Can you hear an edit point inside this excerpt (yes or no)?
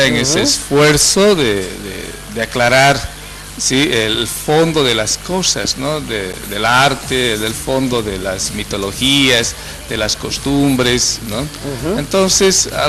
yes